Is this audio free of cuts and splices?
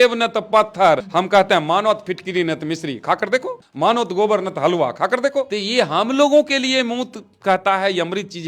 no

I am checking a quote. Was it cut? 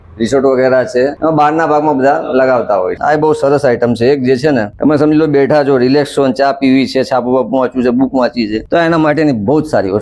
yes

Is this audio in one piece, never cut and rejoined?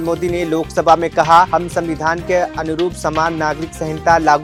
yes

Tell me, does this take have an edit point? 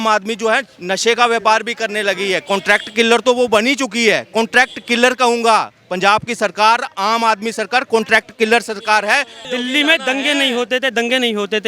yes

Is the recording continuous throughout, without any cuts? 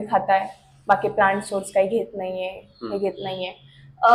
yes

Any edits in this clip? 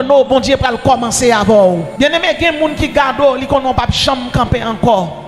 yes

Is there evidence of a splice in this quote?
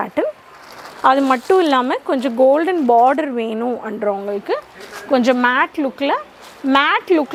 no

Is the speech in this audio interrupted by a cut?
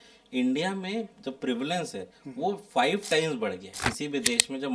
yes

